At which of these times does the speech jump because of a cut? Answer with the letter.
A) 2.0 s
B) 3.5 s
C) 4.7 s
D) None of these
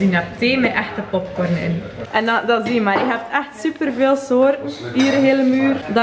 A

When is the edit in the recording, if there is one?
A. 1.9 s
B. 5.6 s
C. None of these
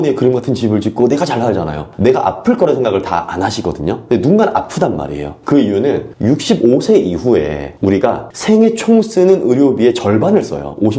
A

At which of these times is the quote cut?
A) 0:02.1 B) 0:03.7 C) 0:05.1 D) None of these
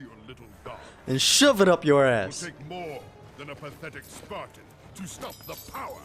D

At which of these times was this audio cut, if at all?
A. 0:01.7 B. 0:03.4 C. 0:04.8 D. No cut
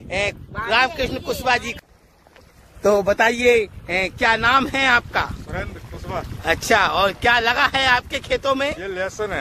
A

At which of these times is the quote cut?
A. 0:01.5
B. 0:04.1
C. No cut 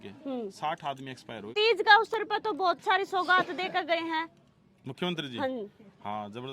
A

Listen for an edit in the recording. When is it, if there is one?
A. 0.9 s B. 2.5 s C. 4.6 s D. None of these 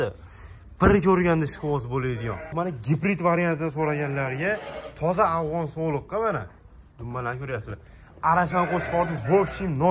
B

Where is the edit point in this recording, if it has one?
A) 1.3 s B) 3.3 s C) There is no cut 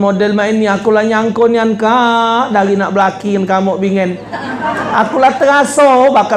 C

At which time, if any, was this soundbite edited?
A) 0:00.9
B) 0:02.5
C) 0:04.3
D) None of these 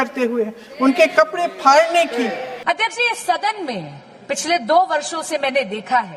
B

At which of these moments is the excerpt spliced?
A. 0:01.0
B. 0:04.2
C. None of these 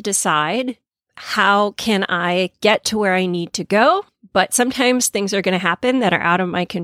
B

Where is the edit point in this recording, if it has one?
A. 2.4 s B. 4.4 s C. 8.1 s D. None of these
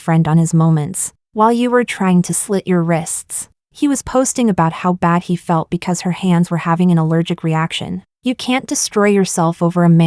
C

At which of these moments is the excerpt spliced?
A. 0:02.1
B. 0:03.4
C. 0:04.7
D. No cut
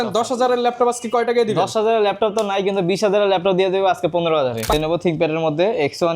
C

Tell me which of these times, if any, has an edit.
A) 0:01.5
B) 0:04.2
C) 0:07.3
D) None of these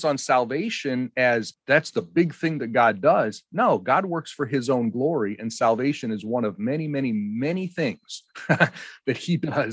A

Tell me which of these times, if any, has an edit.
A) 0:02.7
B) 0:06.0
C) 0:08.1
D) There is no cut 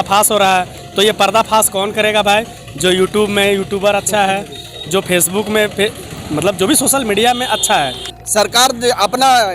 C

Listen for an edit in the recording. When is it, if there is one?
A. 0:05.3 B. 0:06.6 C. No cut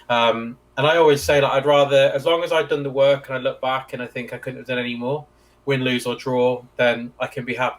C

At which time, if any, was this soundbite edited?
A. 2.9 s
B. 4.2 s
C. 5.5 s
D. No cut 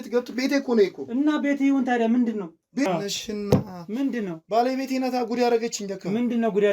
A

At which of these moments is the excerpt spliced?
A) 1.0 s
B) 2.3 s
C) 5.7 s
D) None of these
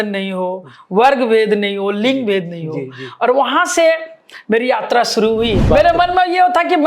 C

